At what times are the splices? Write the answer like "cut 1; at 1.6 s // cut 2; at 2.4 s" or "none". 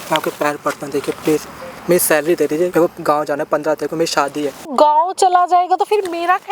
cut 1; at 2.7 s // cut 2; at 4.7 s